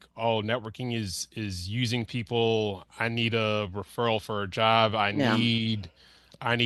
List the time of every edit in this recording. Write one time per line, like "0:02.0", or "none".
none